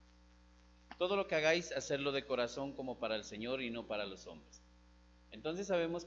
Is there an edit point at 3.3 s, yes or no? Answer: yes